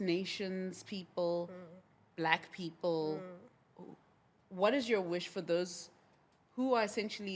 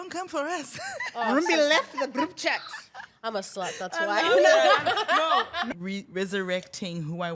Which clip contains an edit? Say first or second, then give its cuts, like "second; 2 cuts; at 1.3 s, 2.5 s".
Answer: second; 1 cut; at 5.7 s